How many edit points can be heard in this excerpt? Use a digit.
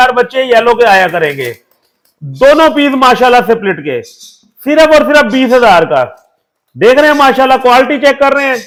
0